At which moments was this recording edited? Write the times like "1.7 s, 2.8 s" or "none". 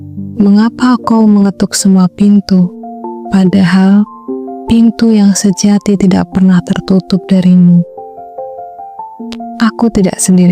8.1 s, 9.5 s